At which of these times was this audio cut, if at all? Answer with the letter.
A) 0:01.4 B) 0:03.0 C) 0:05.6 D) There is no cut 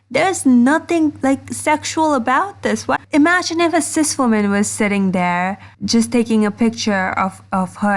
B